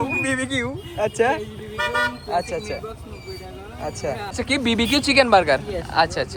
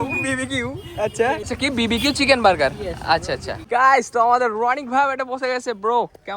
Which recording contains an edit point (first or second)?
second